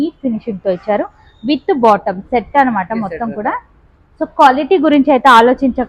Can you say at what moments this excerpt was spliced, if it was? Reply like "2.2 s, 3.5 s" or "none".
none